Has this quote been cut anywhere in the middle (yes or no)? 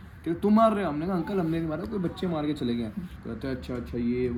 no